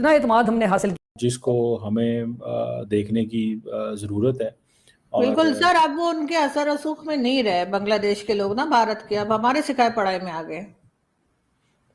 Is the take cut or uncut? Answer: cut